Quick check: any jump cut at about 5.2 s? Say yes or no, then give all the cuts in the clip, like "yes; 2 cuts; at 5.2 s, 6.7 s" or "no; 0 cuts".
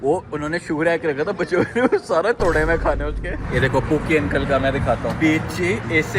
yes; 2 cuts; at 3.4 s, 5.2 s